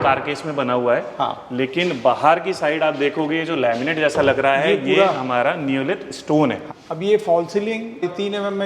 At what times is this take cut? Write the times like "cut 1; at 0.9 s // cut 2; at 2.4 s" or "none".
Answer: cut 1; at 6.6 s